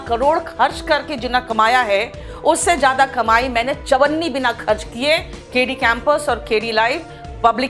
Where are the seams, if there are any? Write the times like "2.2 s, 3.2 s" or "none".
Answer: none